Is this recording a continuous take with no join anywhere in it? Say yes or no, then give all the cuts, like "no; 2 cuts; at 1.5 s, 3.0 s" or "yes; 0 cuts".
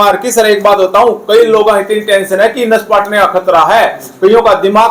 yes; 0 cuts